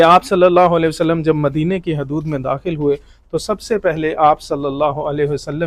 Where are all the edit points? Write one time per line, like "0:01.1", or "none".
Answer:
none